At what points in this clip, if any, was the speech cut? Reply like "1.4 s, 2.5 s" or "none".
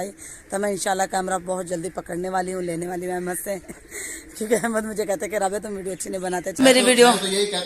6.6 s